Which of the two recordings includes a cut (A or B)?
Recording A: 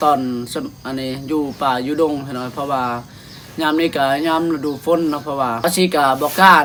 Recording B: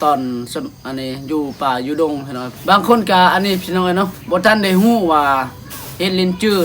B